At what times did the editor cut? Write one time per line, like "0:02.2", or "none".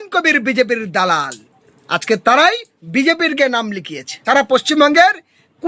0:04.1